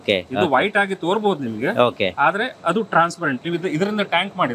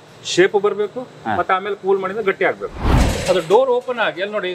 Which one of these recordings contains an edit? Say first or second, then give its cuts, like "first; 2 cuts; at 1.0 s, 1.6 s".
second; 1 cut; at 2.7 s